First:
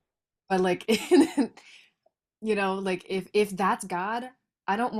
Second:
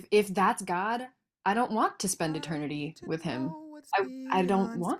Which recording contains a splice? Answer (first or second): second